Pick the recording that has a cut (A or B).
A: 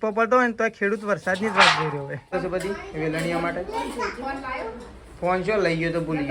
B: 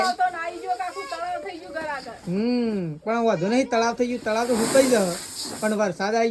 A